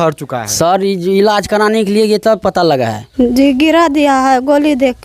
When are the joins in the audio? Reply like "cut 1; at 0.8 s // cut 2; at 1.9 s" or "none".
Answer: cut 1; at 3.0 s